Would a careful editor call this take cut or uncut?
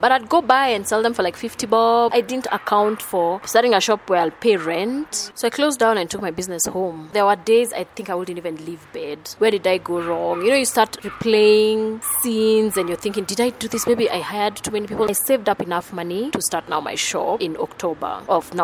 cut